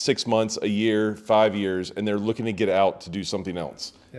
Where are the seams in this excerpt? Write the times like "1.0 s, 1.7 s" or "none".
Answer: none